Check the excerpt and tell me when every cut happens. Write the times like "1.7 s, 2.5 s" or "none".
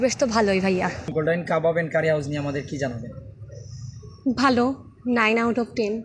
1.0 s

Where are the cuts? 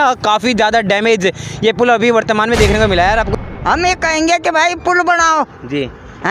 3.3 s

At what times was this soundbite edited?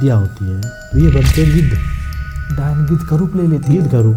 none

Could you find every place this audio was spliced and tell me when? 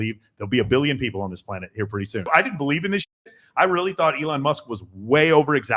2.3 s

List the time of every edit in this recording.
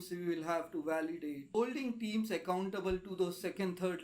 1.4 s

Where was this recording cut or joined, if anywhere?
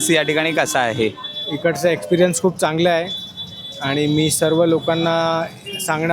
none

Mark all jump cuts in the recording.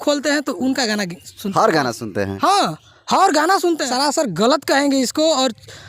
3.8 s

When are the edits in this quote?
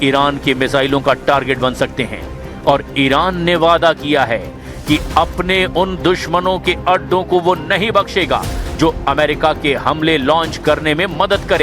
6.2 s

